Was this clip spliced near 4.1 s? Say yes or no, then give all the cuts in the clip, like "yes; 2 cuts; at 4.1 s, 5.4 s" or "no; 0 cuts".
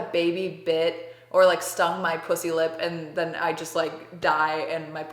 no; 0 cuts